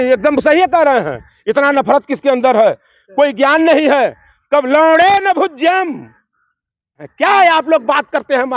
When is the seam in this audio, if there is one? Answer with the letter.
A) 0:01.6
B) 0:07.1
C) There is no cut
B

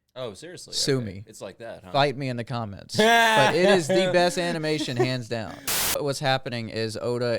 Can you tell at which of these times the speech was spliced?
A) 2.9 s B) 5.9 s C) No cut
B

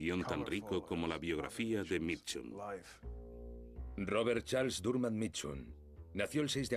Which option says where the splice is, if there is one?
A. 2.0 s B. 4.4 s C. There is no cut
A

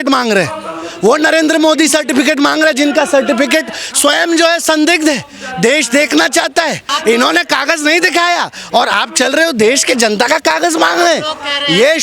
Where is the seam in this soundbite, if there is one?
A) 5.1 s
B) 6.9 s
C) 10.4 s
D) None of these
B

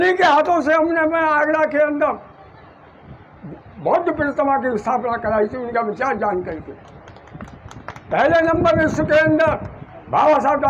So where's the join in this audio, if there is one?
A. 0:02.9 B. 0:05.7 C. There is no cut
C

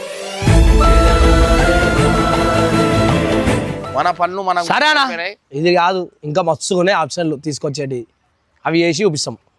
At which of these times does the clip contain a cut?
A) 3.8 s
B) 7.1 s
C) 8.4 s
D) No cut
A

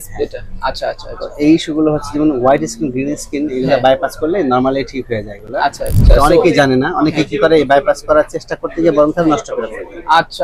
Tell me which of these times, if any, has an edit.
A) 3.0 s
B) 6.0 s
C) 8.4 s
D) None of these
B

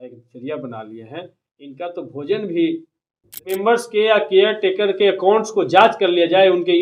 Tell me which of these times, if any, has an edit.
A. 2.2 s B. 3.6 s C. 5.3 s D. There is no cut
B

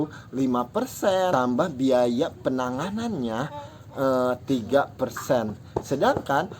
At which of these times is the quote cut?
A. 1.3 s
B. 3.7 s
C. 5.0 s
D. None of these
A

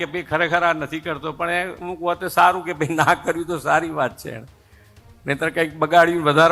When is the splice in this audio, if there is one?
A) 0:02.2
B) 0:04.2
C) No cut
C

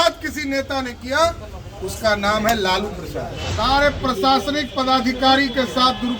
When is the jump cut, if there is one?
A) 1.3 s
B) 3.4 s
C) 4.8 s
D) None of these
B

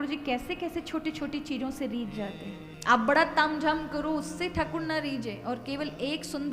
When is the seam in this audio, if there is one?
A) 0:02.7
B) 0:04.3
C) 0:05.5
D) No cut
A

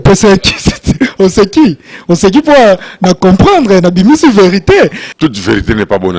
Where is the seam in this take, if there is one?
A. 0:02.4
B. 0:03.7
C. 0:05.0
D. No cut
C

